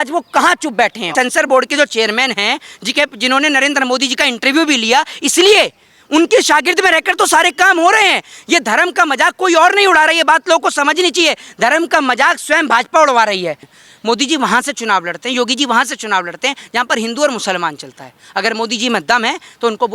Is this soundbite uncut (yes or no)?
no